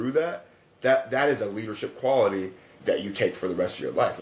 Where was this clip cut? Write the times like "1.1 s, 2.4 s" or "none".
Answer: 2.7 s